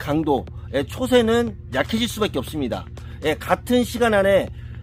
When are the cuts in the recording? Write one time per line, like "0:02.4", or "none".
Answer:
none